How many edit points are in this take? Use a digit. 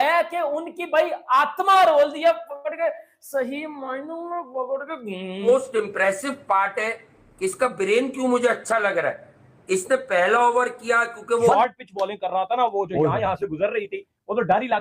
2